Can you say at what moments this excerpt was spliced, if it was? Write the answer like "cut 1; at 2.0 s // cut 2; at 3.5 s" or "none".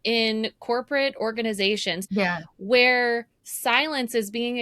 cut 1; at 2.0 s